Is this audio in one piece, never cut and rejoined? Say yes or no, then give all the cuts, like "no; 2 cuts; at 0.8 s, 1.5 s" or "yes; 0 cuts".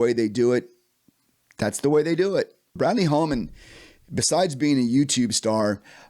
no; 1 cut; at 2.8 s